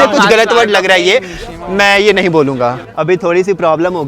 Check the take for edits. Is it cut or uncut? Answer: cut